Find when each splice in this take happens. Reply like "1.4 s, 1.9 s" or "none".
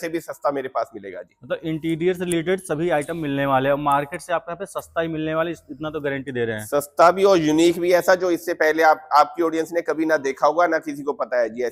none